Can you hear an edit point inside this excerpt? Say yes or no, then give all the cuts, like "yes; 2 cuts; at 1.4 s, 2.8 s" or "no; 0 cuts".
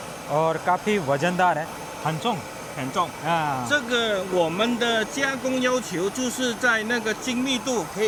no; 0 cuts